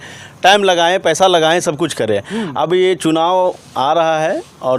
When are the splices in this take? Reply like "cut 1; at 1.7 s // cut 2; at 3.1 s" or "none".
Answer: none